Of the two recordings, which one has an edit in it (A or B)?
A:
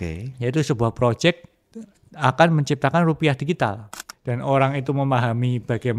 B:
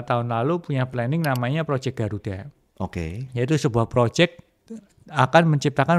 A